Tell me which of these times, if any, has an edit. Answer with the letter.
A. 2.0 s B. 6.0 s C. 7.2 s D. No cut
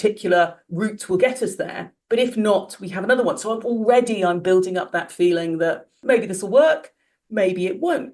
B